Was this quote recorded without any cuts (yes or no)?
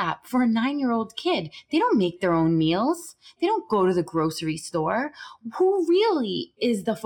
yes